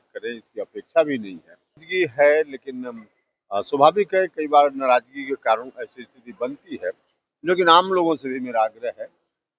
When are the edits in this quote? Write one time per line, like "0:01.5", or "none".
0:01.8

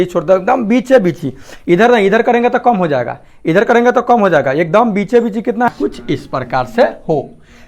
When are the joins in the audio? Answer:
0:05.7

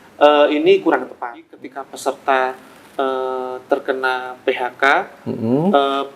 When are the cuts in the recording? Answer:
0:01.5

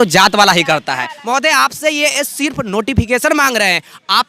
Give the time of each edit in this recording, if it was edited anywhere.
0:01.1

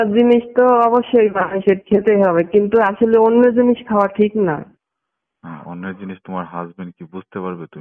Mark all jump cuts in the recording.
none

